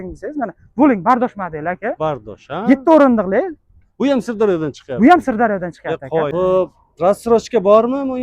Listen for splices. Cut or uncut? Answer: cut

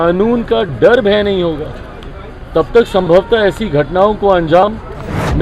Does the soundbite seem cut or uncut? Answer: uncut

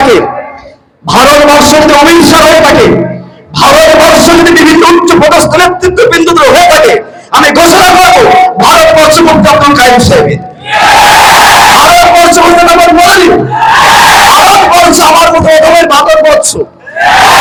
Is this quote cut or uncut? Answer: uncut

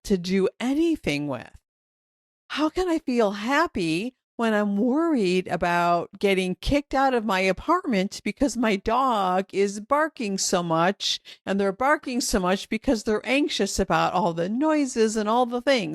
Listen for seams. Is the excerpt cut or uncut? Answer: uncut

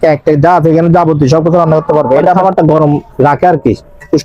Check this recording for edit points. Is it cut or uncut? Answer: cut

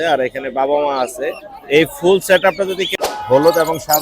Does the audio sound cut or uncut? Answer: cut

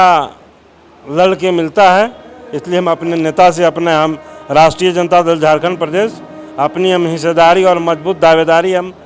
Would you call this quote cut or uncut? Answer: uncut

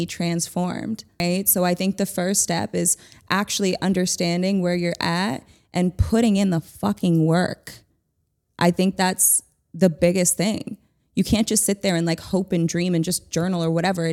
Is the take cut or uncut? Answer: cut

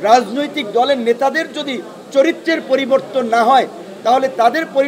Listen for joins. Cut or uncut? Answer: uncut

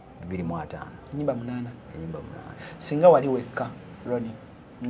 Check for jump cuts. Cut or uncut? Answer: uncut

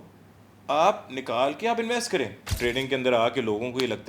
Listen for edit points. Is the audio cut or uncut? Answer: cut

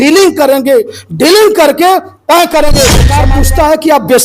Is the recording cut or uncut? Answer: cut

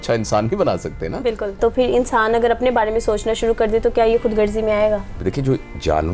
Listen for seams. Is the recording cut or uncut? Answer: cut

